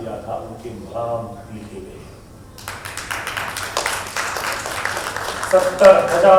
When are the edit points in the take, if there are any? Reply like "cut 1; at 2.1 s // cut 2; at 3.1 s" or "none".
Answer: none